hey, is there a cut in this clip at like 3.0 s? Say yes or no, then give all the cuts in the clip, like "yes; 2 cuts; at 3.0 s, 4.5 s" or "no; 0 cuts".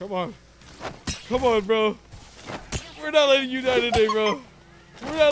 no; 0 cuts